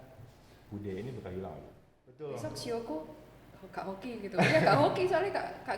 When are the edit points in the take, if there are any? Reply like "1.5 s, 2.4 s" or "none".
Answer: 2.1 s